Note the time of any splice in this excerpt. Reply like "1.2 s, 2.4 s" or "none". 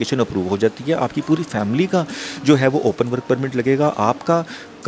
none